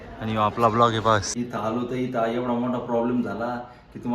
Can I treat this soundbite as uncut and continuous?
no; 1 cut; at 1.3 s

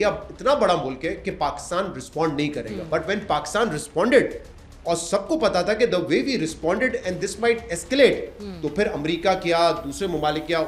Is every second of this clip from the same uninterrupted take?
yes; 0 cuts

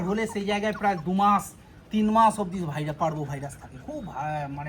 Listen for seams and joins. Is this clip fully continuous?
yes; 0 cuts

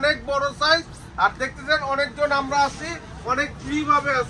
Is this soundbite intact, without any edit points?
yes; 0 cuts

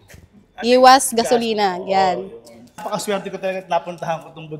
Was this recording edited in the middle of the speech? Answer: yes; 1 cut; at 2.8 s

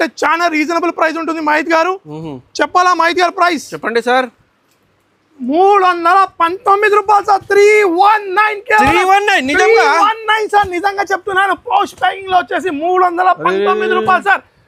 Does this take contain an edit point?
no; 0 cuts

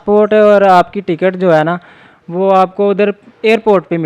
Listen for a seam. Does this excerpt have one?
no; 0 cuts

